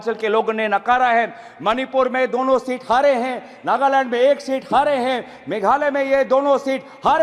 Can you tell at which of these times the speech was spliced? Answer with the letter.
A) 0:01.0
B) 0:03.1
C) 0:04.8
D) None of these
D